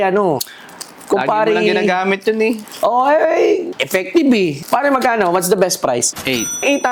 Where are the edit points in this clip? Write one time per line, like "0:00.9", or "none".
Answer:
none